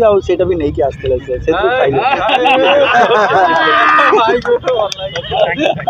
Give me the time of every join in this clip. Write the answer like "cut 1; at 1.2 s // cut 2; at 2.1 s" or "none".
none